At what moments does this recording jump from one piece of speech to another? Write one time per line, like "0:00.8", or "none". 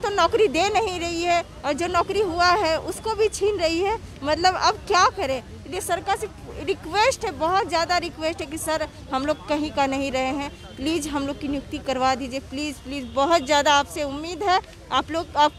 none